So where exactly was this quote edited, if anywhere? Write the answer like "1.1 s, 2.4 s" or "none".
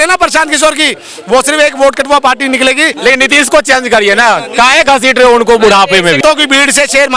2.9 s, 6.2 s